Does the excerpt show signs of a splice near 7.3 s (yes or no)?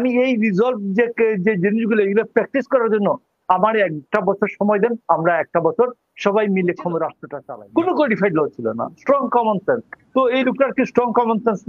yes